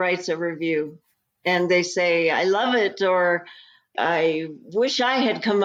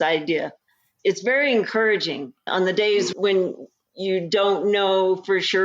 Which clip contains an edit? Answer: second; 1 cut; at 2.3 s

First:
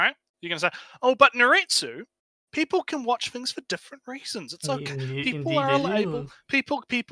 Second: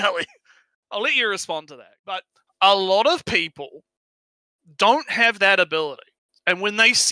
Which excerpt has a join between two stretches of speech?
second; 1 cut; at 2.2 s

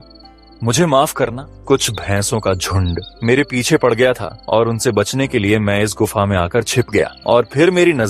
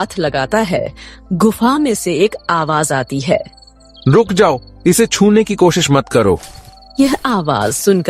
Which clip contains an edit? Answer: first; 4 cuts; at 1.5 s, 3.1 s, 4.3 s, 7.2 s

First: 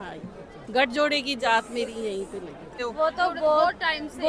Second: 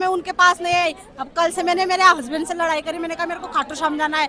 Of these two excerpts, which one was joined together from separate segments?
first; 1 cut; at 2.7 s

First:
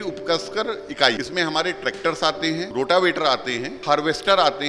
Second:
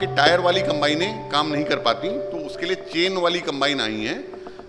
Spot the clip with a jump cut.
first; 3 cuts; at 1.2 s, 2.7 s, 3.7 s

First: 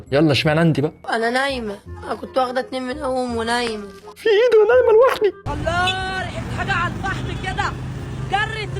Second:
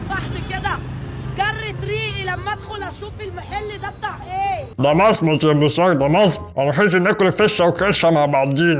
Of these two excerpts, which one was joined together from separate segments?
first; 2 cuts; at 1.0 s, 5.4 s

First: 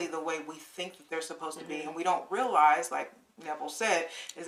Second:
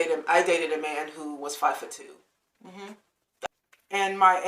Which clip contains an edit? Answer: second; 1 cut; at 3.5 s

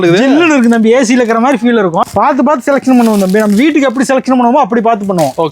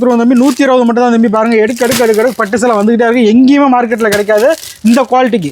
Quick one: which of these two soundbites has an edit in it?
first; 1 cut; at 2.0 s

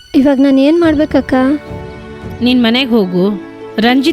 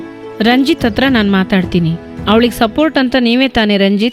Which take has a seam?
second; 1 cut; at 2.0 s

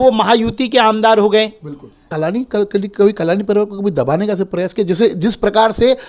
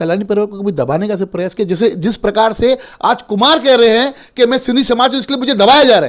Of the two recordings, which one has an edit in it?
first; 1 cut; at 2.1 s

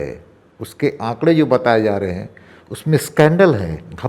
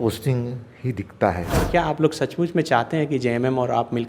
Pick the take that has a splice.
second; 1 cut; at 1.7 s

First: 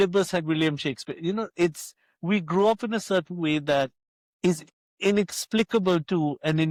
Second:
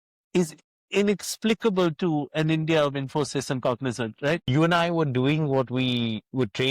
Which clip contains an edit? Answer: second; 1 cut; at 4.4 s

